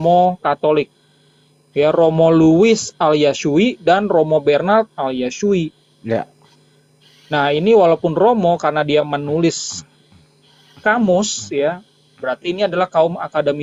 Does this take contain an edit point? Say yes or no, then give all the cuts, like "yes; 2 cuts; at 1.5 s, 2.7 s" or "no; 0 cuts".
no; 0 cuts